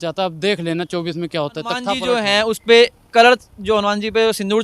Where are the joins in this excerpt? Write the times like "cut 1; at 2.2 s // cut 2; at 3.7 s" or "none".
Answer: cut 1; at 1.9 s